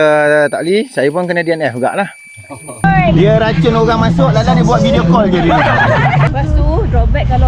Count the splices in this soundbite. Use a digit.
2